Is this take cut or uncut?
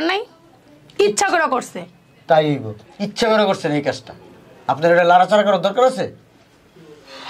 uncut